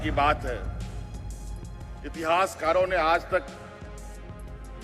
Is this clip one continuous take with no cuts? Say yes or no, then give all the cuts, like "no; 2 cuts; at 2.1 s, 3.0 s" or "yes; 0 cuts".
no; 1 cut; at 3.5 s